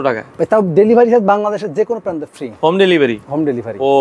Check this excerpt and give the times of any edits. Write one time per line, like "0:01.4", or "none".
none